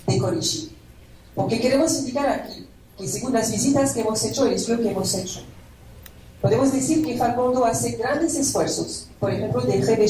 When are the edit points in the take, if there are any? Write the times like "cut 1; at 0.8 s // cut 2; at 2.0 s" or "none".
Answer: cut 1; at 2.9 s